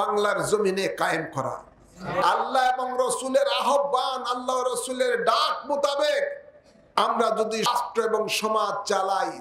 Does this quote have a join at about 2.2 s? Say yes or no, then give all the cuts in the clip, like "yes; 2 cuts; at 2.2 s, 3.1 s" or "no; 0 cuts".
yes; 2 cuts; at 2.2 s, 7.7 s